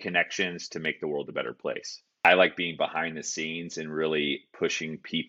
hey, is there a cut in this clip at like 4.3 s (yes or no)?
no